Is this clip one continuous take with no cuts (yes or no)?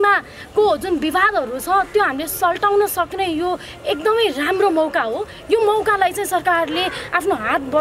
yes